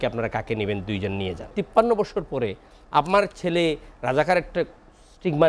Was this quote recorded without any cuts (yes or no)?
no